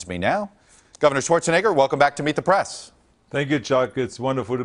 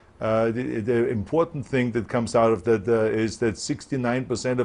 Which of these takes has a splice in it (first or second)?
second